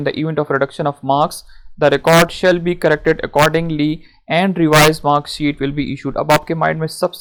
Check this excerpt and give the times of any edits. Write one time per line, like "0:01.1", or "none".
none

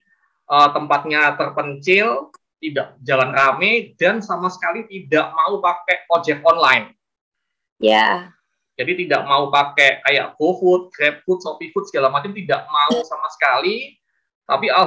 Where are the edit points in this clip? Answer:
none

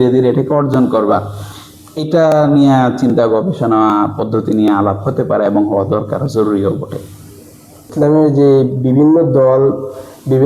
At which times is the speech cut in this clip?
0:07.9

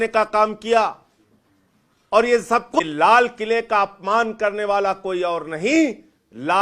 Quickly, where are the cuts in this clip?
0:02.8

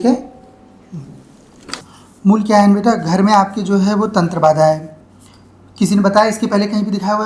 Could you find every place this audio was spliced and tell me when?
0:01.9

